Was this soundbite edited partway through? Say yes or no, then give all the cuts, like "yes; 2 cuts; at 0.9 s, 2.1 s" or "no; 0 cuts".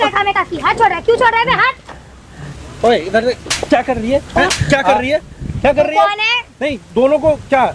no; 0 cuts